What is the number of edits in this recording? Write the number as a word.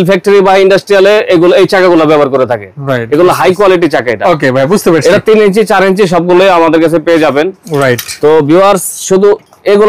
zero